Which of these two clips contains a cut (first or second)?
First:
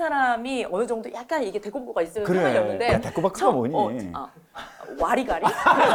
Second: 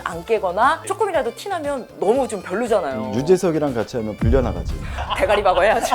second